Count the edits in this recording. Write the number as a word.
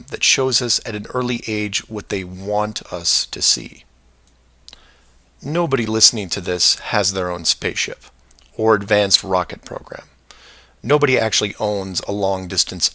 zero